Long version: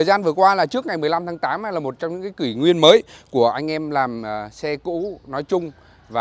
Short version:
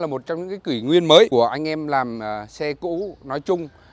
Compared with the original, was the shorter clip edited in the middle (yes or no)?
yes